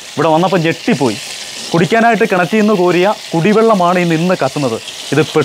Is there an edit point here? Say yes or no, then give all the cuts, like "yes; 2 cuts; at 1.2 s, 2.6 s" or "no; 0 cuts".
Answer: no; 0 cuts